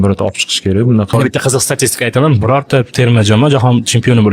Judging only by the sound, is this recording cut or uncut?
cut